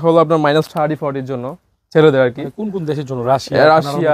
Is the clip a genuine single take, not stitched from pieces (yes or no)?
yes